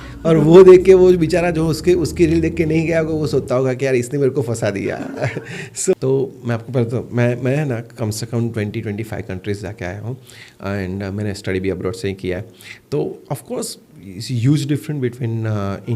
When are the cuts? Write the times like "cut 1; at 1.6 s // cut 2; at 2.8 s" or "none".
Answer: cut 1; at 5.9 s